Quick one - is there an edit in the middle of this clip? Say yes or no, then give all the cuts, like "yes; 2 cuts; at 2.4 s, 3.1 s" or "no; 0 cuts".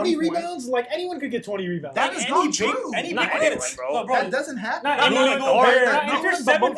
no; 0 cuts